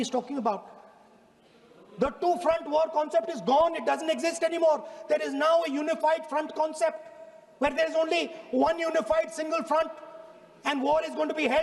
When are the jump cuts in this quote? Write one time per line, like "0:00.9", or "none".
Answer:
none

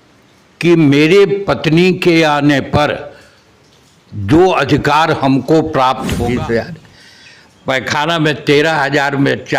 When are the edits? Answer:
0:06.2

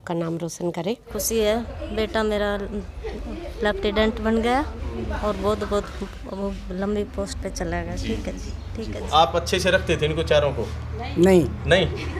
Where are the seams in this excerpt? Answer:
0:01.1
0:09.1

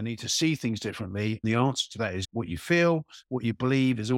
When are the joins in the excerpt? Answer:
0:01.4
0:02.2

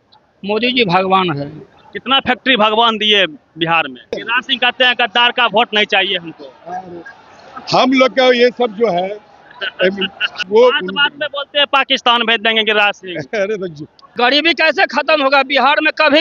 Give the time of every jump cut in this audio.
0:04.2
0:10.3
0:14.0

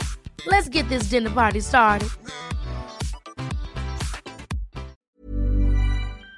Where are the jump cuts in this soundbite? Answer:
0:05.0

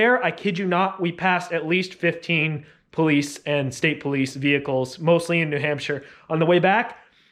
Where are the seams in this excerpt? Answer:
none

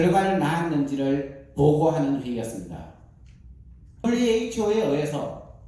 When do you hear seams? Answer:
0:04.0

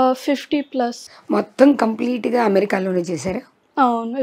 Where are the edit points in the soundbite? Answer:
0:01.1

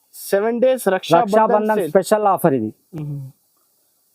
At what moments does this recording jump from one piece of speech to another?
none

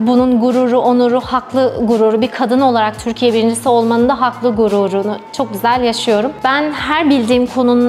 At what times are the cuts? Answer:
0:06.3

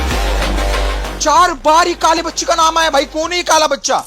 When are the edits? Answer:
0:01.0

